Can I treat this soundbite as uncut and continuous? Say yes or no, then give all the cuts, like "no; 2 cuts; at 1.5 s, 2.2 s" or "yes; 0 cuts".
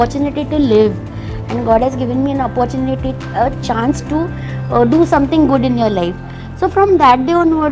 yes; 0 cuts